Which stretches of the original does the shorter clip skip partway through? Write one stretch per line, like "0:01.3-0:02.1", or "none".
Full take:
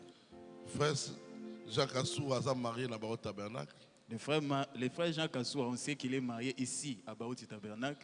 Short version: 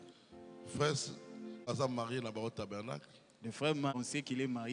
0:01.7-0:02.3
0:04.6-0:05.7